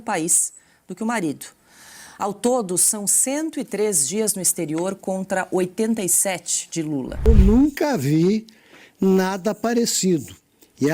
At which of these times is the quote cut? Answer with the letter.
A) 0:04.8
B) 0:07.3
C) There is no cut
B